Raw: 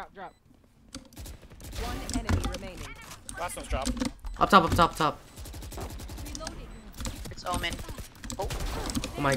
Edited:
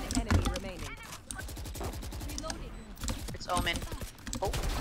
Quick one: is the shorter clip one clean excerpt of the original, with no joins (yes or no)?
no